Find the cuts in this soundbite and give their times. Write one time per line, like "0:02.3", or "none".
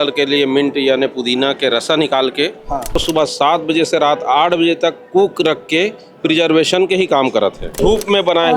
0:03.0
0:07.8